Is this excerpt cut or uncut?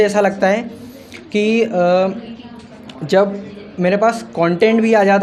uncut